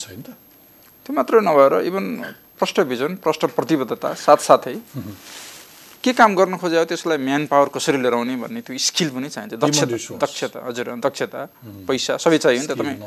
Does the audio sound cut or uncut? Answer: uncut